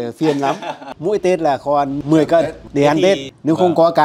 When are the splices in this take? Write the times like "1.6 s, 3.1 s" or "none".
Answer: 0.9 s, 3.3 s